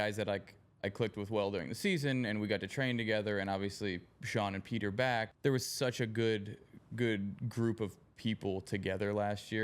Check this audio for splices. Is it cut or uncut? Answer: cut